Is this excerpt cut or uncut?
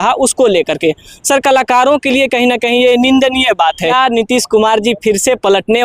cut